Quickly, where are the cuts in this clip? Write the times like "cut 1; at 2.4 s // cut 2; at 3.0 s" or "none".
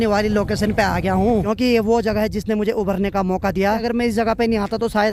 cut 1; at 1.5 s // cut 2; at 3.8 s